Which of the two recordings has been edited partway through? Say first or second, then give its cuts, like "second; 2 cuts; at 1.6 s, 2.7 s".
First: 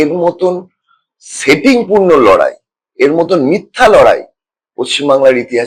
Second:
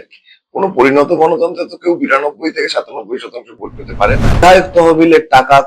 second; 1 cut; at 4.4 s